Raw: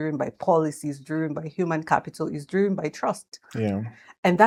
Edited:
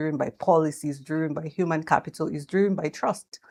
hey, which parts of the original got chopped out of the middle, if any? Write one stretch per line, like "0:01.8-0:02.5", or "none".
none